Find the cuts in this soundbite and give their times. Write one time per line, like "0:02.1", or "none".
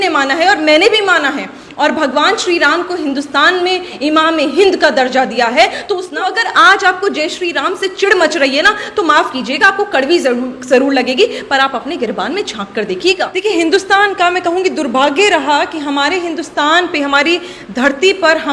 0:06.3
0:13.4